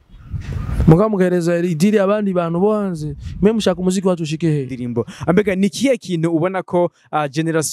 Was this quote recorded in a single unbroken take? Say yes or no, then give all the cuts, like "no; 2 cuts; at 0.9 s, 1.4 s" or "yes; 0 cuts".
no; 1 cut; at 4.9 s